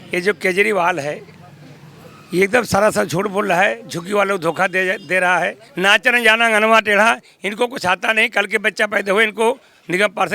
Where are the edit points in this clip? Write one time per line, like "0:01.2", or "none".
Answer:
0:05.6